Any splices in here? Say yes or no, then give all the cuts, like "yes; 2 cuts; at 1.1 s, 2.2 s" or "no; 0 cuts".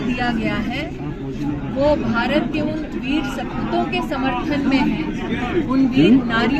no; 0 cuts